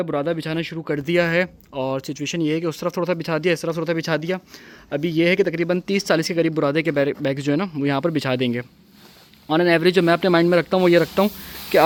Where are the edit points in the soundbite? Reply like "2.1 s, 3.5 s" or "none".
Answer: none